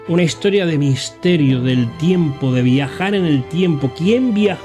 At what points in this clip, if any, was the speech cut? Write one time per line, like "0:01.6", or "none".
none